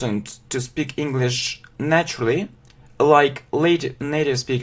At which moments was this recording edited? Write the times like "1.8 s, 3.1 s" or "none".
1.3 s